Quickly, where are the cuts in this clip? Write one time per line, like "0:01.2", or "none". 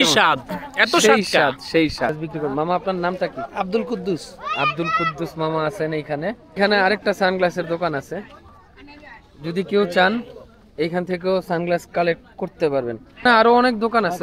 0:02.1
0:06.6
0:13.2